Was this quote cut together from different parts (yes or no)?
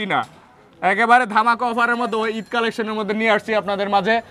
no